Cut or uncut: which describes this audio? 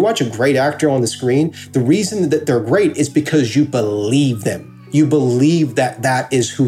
uncut